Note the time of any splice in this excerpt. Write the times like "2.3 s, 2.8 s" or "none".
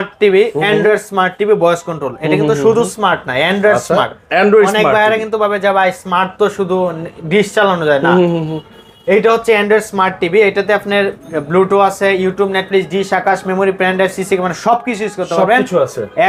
none